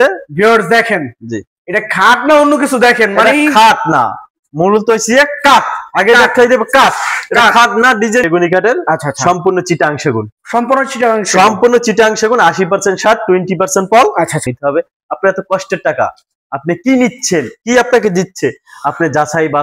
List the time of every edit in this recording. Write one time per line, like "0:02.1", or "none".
0:08.3
0:14.5